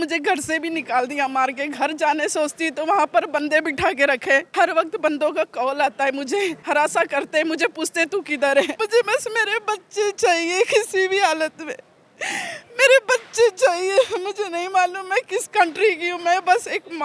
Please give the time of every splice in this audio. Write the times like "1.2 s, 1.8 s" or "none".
4.5 s, 6.6 s, 8.8 s

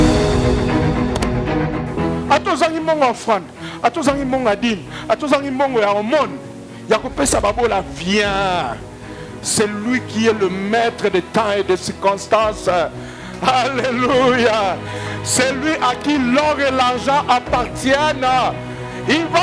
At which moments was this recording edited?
1.8 s

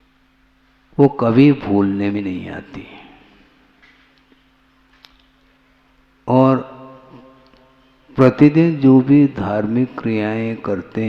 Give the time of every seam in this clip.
2.2 s

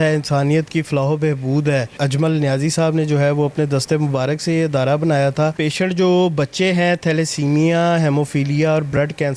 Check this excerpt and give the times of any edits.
1.9 s, 5.6 s

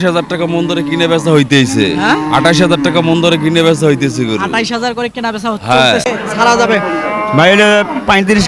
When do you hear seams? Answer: 6.1 s

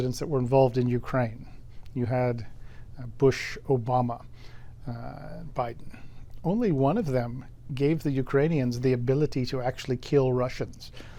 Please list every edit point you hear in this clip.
none

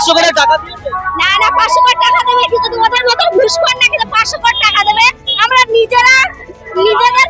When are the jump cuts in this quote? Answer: none

